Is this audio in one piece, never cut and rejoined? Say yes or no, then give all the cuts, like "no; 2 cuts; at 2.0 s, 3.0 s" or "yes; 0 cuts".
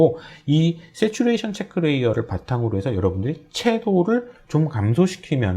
yes; 0 cuts